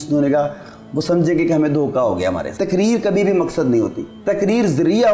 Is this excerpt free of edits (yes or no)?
no